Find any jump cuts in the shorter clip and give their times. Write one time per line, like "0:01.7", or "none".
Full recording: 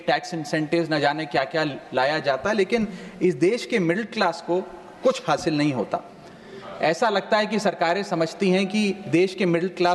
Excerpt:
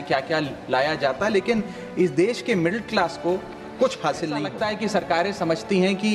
0:04.5